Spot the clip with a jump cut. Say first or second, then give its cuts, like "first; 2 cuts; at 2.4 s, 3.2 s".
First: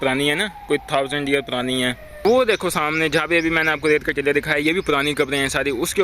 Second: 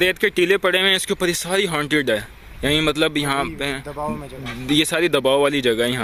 first; 1 cut; at 2.2 s